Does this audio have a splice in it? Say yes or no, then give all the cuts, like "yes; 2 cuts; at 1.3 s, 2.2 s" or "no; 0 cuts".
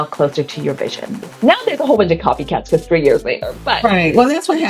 yes; 1 cut; at 1.1 s